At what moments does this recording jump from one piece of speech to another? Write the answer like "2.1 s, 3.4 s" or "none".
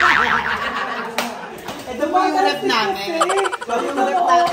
1.9 s